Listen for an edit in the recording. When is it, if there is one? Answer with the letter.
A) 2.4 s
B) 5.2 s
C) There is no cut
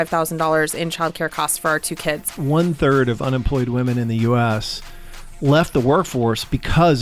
A